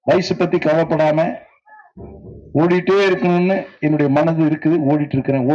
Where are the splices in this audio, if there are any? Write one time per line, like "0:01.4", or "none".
none